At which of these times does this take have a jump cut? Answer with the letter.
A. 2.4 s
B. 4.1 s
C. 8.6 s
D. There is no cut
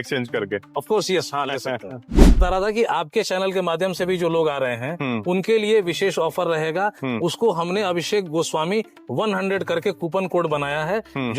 A